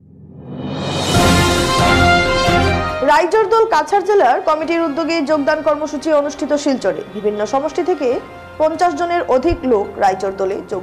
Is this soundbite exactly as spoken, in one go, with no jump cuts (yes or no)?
no